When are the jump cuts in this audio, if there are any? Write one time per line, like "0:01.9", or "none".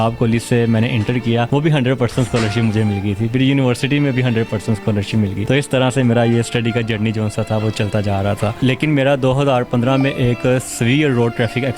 0:01.5
0:05.4
0:08.6